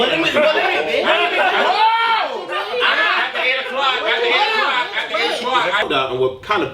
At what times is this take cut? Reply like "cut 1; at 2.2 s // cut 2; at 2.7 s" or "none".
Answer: cut 1; at 5.9 s